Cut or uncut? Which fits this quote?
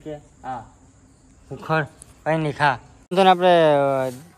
cut